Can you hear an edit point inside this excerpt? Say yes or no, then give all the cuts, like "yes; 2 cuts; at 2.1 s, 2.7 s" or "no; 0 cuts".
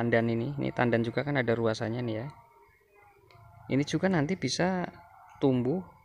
no; 0 cuts